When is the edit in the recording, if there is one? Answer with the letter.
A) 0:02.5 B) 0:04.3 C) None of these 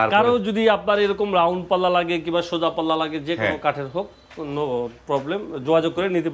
C